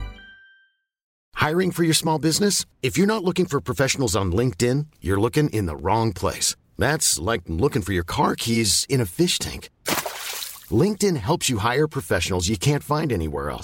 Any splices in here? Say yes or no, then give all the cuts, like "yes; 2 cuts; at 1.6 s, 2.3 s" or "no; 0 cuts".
no; 0 cuts